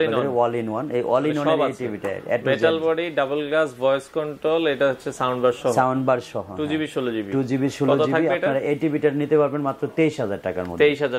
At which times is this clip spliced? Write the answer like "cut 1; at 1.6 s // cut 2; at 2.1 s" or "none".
none